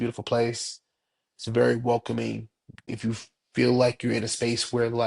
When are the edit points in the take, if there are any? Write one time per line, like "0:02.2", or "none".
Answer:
0:02.9